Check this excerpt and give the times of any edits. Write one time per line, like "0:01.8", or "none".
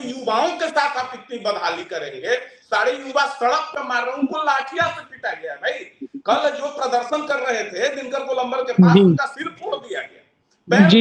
none